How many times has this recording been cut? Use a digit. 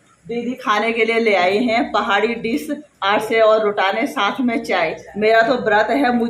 0